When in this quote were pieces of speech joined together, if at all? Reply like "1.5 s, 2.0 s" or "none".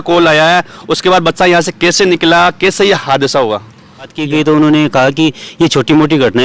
4.2 s